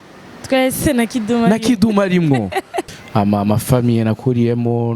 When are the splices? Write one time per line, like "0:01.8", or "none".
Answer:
0:02.8